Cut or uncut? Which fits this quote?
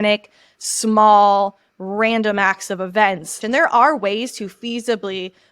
cut